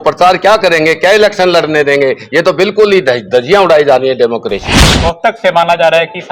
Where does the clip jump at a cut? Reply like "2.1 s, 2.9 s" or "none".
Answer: 4.9 s